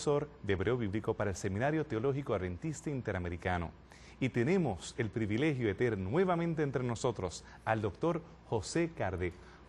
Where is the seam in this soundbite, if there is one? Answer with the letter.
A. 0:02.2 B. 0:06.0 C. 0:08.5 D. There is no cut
C